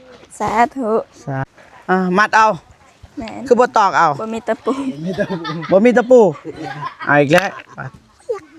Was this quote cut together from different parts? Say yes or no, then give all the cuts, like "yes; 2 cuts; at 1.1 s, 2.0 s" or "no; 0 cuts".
yes; 1 cut; at 1.4 s